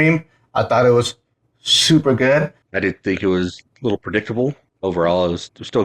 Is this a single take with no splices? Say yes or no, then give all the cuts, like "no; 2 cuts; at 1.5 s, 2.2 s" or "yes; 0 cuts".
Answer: no; 2 cuts; at 2.6 s, 4.7 s